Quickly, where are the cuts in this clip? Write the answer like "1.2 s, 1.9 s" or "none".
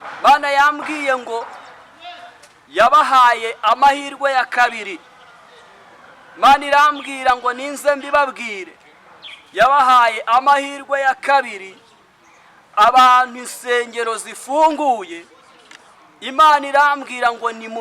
none